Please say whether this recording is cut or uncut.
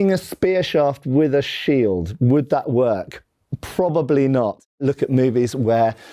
uncut